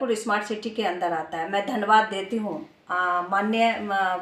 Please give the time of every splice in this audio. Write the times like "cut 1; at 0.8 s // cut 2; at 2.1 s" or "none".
none